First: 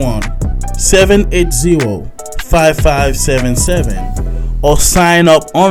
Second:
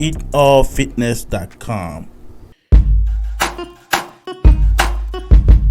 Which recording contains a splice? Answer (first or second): second